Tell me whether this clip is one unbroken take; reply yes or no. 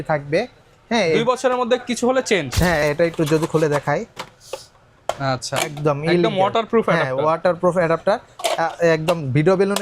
no